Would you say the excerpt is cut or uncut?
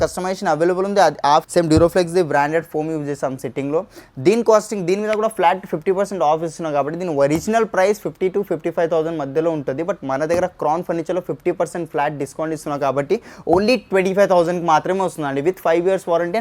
cut